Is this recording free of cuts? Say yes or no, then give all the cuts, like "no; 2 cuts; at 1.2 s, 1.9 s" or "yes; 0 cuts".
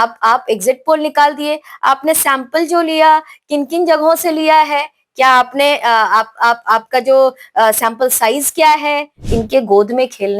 no; 1 cut; at 9.2 s